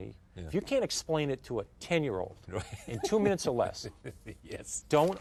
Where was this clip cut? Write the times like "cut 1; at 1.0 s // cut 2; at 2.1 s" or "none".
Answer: none

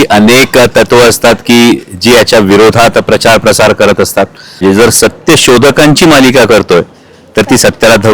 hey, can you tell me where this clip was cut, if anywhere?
cut 1; at 4.6 s

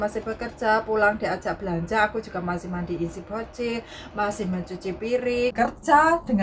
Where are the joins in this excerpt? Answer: cut 1; at 5.5 s

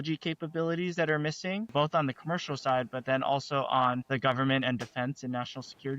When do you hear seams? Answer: cut 1; at 1.7 s // cut 2; at 4.0 s

